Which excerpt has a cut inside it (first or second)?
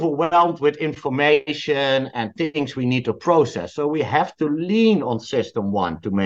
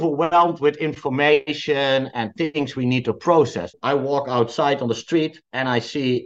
second